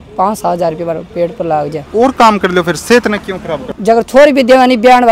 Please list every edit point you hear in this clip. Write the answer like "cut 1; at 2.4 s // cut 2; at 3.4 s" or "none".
cut 1; at 1.9 s // cut 2; at 3.6 s